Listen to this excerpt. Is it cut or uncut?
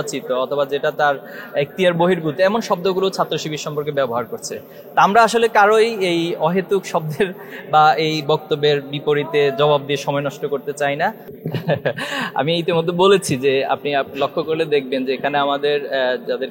cut